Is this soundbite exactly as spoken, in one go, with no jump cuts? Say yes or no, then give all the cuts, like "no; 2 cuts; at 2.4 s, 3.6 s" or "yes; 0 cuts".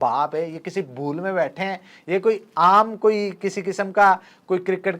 no; 1 cut; at 2.5 s